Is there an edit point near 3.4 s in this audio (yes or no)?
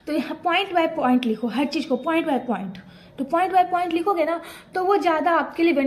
no